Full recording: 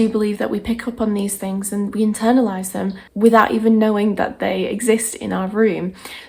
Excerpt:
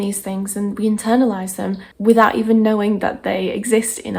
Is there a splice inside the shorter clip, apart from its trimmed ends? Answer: no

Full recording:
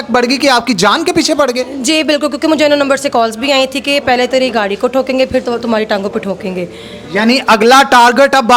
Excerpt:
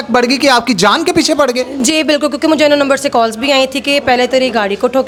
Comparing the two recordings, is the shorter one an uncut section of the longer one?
yes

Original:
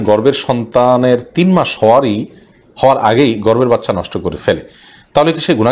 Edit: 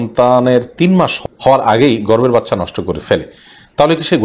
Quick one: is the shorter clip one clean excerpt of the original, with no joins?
no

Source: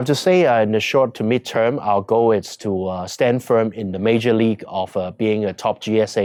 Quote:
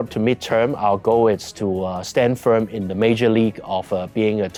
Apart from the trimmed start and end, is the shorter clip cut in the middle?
no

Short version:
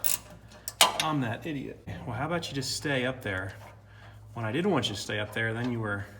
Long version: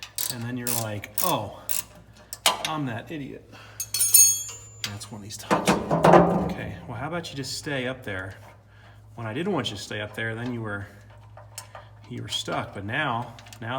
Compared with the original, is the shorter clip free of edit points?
no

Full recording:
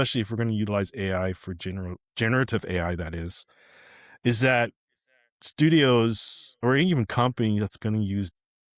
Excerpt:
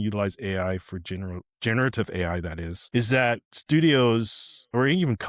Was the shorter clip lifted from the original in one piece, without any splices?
no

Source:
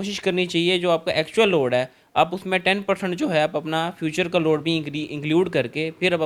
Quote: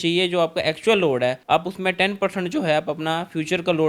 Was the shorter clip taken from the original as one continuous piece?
no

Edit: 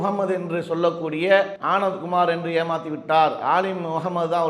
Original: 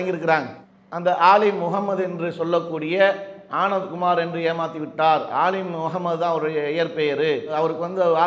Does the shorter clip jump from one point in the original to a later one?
yes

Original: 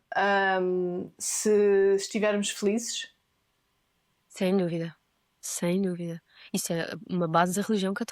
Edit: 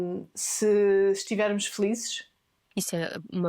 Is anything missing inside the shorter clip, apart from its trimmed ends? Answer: yes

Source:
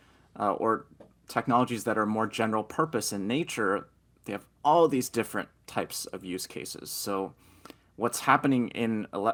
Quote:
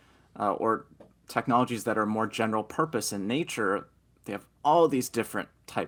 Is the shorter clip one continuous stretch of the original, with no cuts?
yes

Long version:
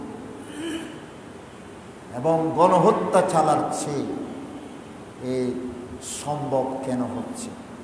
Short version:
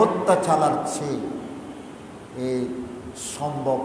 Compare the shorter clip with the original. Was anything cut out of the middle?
no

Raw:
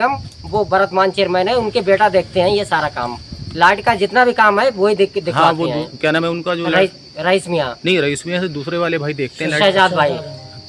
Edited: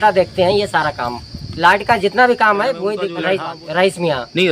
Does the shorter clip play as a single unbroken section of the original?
no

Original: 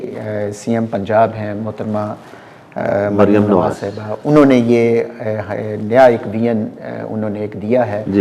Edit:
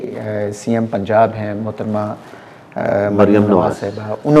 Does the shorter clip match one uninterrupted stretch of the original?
yes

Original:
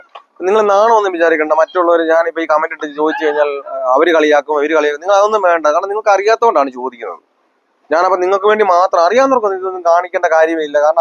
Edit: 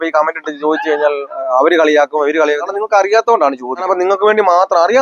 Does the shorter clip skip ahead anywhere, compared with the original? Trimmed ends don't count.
yes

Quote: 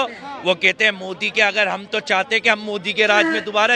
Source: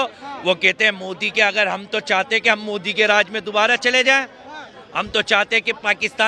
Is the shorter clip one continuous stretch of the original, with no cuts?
yes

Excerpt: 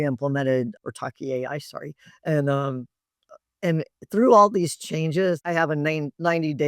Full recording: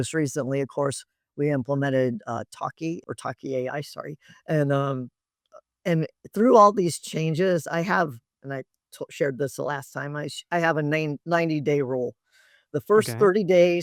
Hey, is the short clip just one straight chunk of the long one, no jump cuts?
no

